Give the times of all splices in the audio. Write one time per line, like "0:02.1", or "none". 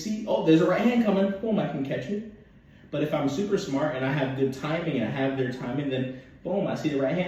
none